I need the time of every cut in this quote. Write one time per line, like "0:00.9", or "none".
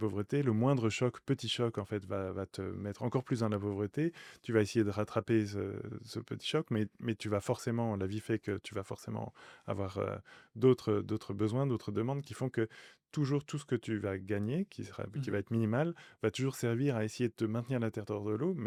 none

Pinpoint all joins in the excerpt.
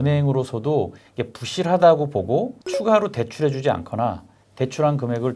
0:01.1
0:02.6

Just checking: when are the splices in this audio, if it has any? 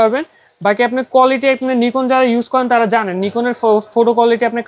none

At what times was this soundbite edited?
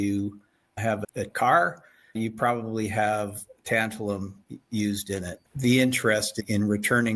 0:01.2
0:05.5

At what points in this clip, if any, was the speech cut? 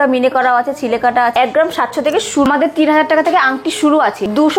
0:01.3
0:02.5

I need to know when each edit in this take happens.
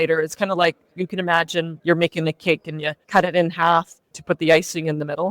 0:01.7
0:02.9
0:04.1

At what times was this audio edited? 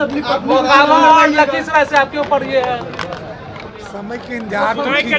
none

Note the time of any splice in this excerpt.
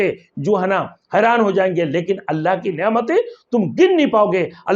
none

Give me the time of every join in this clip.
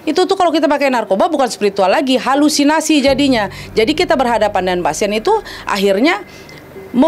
none

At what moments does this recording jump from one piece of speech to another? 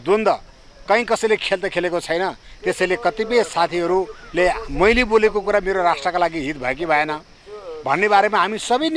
none

